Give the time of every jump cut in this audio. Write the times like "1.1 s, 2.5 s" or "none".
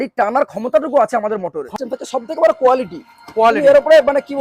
1.6 s